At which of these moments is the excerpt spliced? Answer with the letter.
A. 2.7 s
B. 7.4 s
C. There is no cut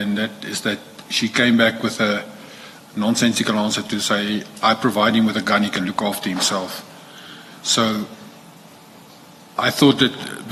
C